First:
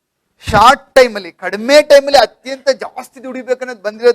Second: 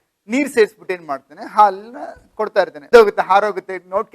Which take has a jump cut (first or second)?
second